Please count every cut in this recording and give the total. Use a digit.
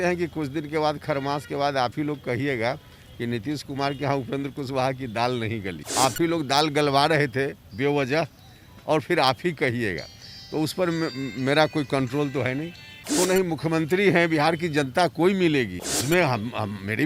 3